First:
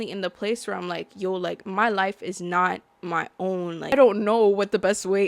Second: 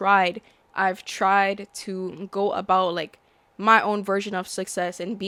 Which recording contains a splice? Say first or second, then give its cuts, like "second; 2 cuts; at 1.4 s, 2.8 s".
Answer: first; 1 cut; at 3.9 s